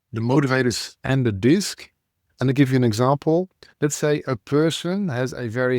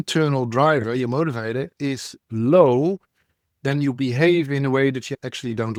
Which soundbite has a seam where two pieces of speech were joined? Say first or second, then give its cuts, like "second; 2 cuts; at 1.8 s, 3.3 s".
first; 1 cut; at 3.6 s